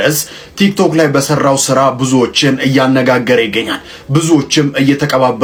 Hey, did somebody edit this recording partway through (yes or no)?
no